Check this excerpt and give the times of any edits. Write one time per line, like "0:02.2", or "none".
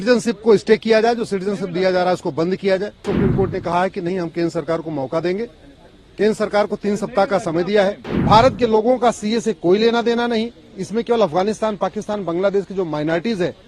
0:03.1
0:08.1